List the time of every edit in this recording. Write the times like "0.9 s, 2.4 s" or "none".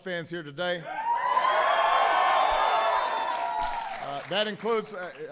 3.9 s